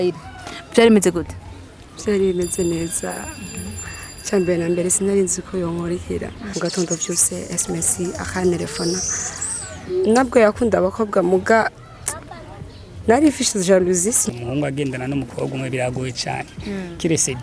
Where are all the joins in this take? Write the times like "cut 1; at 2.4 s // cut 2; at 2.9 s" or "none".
cut 1; at 6.4 s // cut 2; at 14.2 s